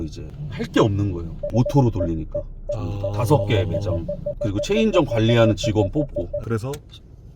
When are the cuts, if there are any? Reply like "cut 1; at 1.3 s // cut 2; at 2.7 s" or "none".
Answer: cut 1; at 1.4 s // cut 2; at 4.4 s